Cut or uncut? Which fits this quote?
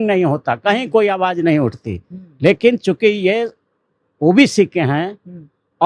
uncut